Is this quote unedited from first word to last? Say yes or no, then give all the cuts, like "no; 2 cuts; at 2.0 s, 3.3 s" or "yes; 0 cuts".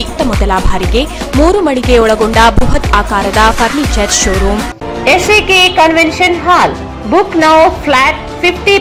yes; 0 cuts